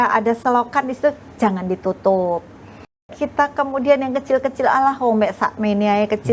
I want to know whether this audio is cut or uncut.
cut